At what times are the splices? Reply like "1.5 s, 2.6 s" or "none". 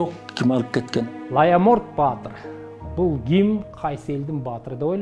1.0 s